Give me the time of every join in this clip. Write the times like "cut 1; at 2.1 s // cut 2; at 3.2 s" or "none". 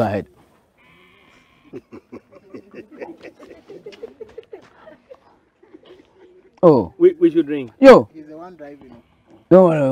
none

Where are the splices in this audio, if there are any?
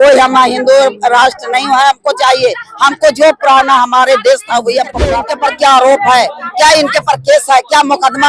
cut 1; at 5.2 s

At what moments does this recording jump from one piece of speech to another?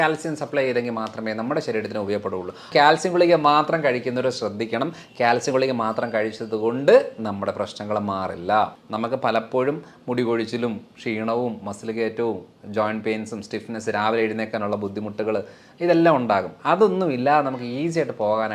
cut 1; at 2.7 s // cut 2; at 8.8 s

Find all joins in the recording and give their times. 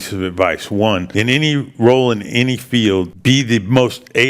cut 1; at 1.1 s // cut 2; at 3.1 s

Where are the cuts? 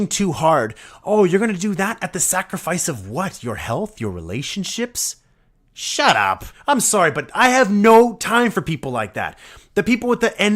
cut 1; at 6.5 s

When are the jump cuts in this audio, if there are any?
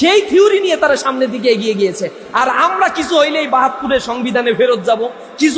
none

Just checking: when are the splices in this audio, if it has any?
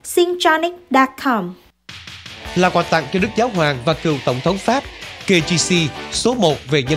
cut 1; at 1.6 s

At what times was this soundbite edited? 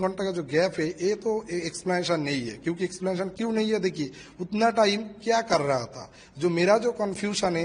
none

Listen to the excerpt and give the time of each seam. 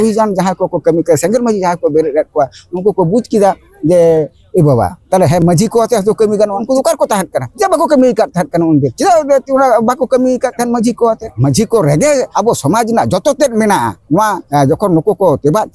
cut 1; at 6.6 s // cut 2; at 7.4 s // cut 3; at 8.9 s // cut 4; at 11.3 s // cut 5; at 12.3 s // cut 6; at 14.4 s

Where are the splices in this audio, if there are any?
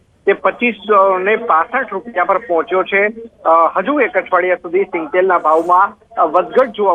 cut 1; at 6.0 s

